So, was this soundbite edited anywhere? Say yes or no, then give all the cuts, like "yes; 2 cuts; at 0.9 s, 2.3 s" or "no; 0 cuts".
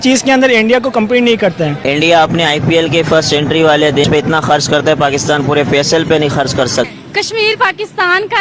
yes; 3 cuts; at 1.8 s, 4.0 s, 6.9 s